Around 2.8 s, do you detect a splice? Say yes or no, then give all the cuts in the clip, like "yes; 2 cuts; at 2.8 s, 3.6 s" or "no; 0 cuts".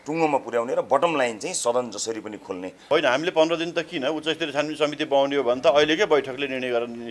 yes; 1 cut; at 2.8 s